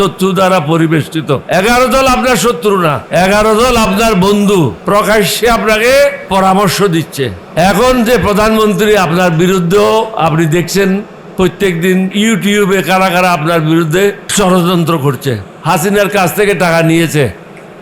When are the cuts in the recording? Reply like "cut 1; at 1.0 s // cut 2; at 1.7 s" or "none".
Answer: cut 1; at 1.4 s // cut 2; at 3.0 s // cut 3; at 4.8 s // cut 4; at 6.2 s // cut 5; at 7.4 s // cut 6; at 12.1 s // cut 7; at 14.3 s // cut 8; at 15.5 s